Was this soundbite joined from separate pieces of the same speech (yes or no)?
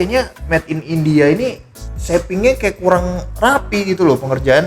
no